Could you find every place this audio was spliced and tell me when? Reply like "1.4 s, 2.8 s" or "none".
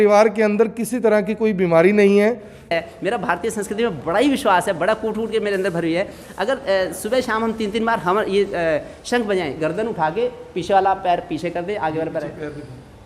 2.7 s